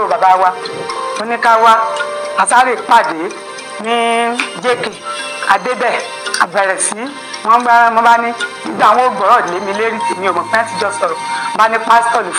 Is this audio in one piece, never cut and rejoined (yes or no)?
yes